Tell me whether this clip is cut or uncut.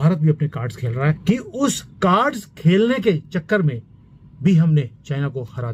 cut